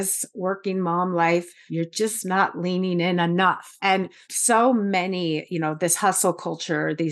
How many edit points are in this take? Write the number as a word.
two